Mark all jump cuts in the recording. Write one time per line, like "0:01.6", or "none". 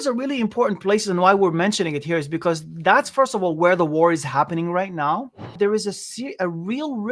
0:05.5